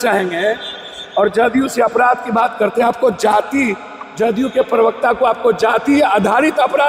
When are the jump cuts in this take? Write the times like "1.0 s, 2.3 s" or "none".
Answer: none